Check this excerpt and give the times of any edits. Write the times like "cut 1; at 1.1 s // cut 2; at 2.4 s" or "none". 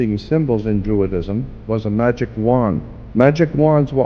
cut 1; at 1.5 s // cut 2; at 2.9 s